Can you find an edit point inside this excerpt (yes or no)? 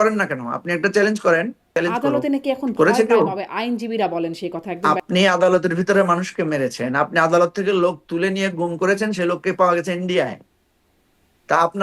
yes